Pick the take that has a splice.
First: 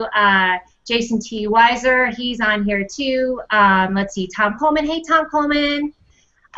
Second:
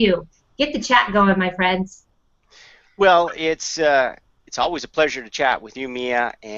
first; 1 cut; at 4.1 s

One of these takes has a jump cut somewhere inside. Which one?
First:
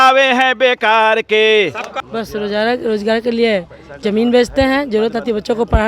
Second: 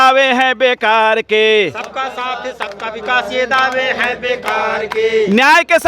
first; 1 cut; at 1.9 s

